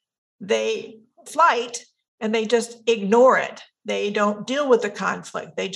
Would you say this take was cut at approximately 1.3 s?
yes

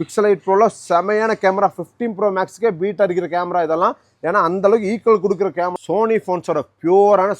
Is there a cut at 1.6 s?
no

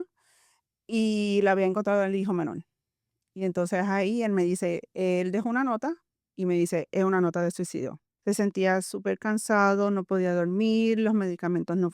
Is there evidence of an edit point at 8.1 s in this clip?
yes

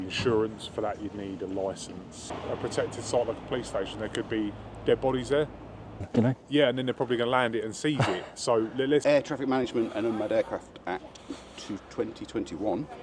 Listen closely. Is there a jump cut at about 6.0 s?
yes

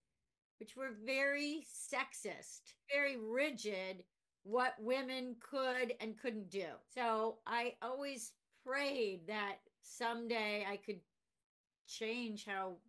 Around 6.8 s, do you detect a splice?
yes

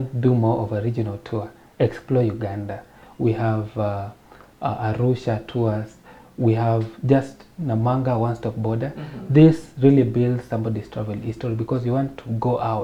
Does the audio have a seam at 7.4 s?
no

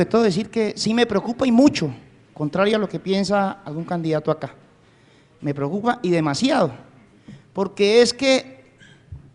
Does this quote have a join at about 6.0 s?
no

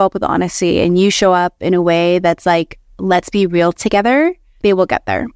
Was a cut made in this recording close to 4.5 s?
yes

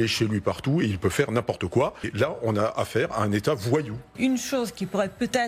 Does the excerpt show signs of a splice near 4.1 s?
yes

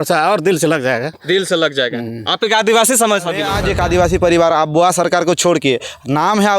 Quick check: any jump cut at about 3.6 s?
yes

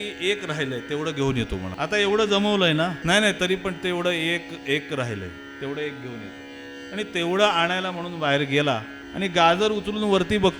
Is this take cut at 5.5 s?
no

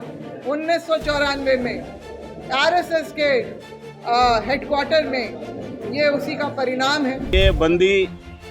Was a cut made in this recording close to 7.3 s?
yes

